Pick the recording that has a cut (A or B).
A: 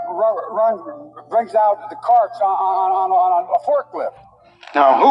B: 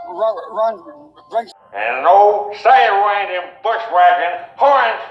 B